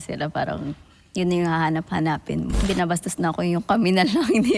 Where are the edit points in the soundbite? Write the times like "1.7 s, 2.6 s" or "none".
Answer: 2.6 s